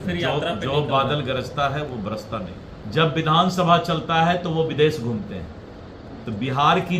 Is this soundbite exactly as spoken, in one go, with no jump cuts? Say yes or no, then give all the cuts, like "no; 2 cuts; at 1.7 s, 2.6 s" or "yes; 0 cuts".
no; 1 cut; at 2.8 s